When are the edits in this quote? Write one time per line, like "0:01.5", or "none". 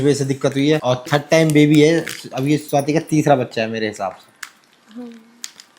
none